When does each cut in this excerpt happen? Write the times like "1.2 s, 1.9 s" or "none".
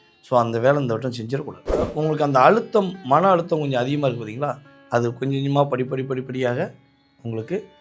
1.9 s